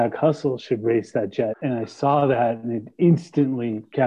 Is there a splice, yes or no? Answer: yes